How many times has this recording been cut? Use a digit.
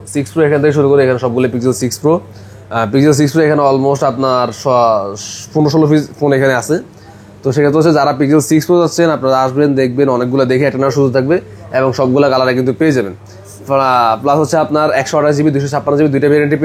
0